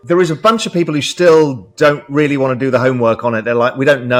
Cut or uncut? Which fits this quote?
uncut